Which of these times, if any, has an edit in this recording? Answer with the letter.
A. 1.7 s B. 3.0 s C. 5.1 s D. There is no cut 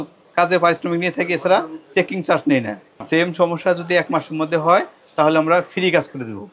B